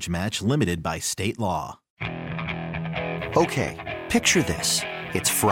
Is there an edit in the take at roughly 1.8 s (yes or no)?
yes